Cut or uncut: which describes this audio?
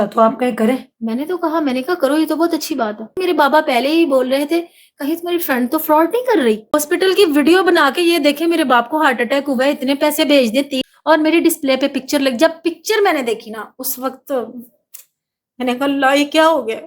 cut